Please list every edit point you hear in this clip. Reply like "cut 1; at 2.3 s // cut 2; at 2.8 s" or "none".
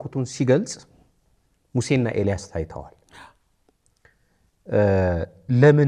none